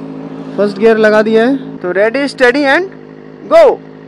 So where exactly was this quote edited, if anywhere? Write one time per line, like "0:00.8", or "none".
0:01.7

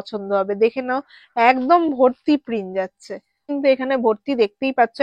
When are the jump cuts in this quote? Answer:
0:03.5

